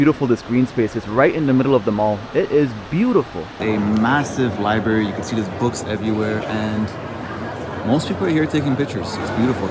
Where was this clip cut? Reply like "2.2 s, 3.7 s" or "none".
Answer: 3.6 s

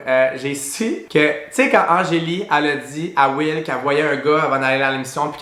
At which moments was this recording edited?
none

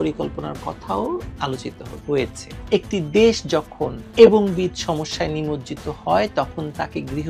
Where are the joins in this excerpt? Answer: 2.6 s

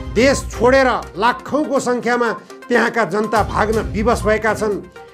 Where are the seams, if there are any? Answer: none

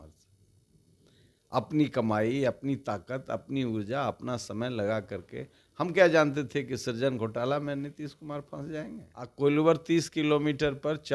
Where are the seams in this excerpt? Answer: 9.3 s

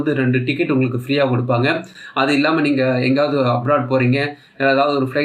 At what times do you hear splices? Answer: none

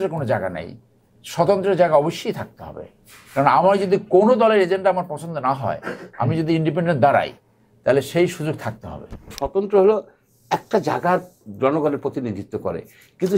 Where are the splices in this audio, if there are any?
9.4 s

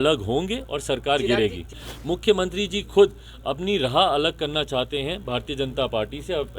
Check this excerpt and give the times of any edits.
1.7 s

